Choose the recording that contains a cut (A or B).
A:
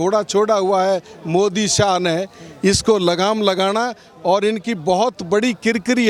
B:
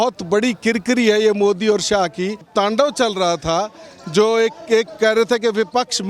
B